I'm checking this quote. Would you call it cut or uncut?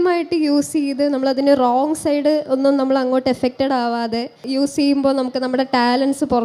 cut